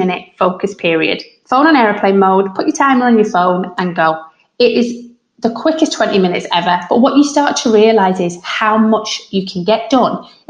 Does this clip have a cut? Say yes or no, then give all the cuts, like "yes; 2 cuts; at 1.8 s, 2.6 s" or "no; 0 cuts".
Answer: no; 0 cuts